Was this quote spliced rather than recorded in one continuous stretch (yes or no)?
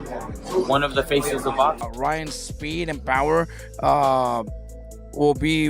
yes